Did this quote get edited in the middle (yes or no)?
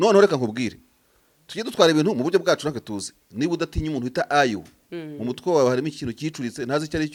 no